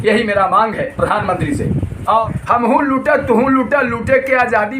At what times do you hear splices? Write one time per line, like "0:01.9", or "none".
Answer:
0:02.3